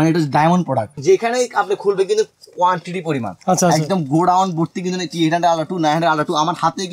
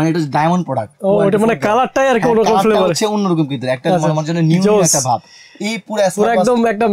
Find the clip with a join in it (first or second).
first